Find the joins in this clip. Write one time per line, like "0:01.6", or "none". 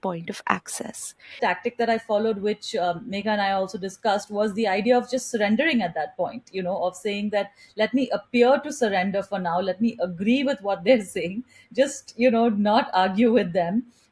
0:01.4